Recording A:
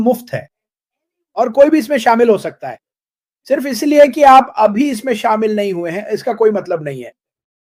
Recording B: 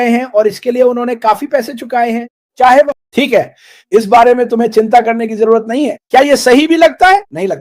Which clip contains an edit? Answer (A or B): B